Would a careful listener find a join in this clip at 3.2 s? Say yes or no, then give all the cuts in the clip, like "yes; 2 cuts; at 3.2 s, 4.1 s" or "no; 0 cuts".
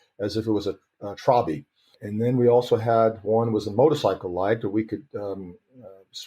no; 1 cut; at 2.0 s